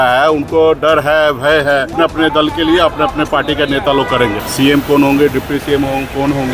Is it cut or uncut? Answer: cut